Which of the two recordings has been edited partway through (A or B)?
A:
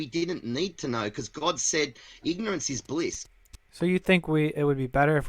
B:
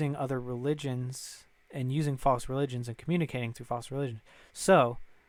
A